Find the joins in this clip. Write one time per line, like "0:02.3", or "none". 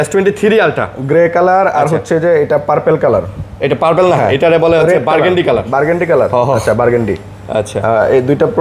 none